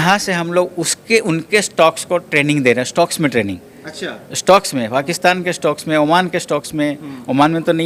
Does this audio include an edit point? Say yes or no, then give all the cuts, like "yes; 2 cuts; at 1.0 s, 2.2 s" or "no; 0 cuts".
no; 0 cuts